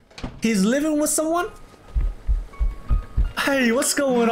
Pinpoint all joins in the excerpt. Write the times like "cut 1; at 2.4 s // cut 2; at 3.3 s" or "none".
none